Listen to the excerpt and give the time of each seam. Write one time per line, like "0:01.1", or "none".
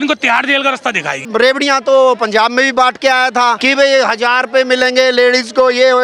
0:01.3
0:03.6